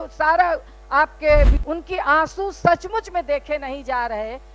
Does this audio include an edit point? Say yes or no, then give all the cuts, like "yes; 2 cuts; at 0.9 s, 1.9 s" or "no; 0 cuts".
yes; 1 cut; at 1.6 s